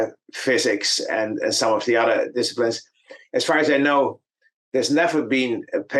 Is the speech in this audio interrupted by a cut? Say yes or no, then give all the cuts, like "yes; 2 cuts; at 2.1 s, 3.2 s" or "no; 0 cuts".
no; 0 cuts